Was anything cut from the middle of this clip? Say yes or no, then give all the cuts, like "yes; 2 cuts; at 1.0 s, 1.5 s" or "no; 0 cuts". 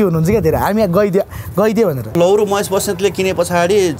yes; 1 cut; at 2.1 s